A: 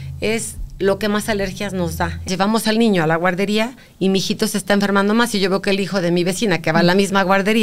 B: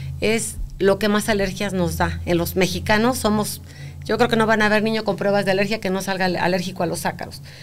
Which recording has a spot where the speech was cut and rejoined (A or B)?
A